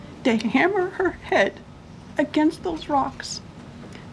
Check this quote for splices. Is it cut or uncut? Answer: uncut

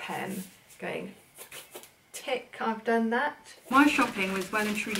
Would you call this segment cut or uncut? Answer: cut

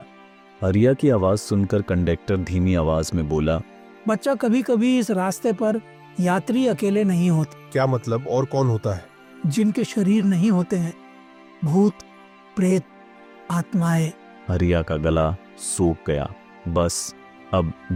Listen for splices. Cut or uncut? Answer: uncut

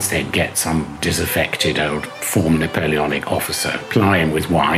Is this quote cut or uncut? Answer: cut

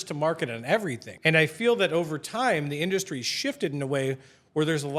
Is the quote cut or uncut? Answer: cut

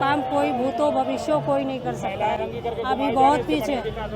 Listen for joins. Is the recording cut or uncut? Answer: uncut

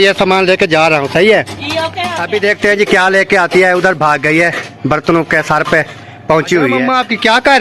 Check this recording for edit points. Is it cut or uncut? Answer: cut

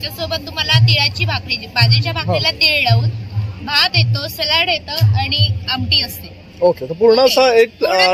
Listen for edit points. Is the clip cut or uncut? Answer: uncut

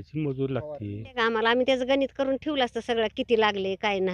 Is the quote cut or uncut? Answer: cut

